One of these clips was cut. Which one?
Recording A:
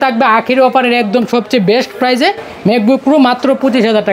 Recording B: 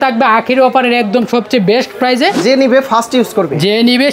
B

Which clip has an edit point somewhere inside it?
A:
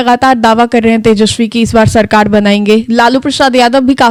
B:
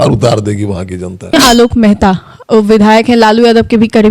B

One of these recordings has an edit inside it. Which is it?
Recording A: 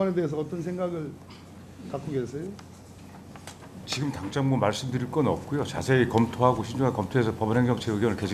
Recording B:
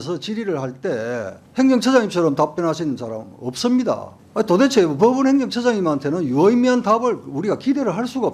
B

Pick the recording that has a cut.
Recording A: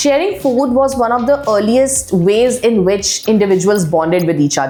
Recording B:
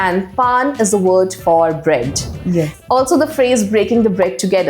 B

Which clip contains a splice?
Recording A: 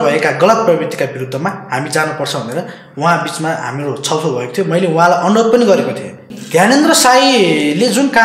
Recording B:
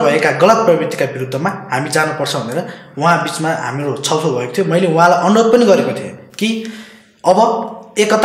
A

